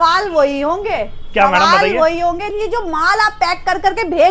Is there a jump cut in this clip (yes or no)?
yes